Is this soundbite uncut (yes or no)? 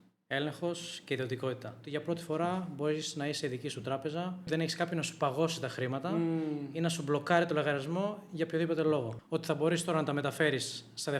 no